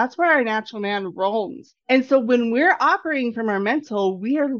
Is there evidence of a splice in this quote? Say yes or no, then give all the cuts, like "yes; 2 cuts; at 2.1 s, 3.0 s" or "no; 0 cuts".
yes; 1 cut; at 1.6 s